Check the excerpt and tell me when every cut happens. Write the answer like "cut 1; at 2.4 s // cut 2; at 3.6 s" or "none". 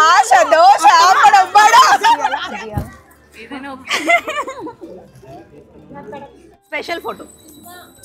cut 1; at 2.3 s // cut 2; at 6.4 s